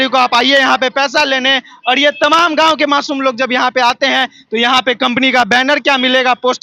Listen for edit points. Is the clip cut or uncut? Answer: uncut